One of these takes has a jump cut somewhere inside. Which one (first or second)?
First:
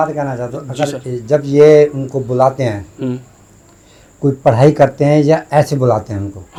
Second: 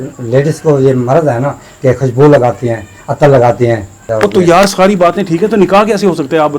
second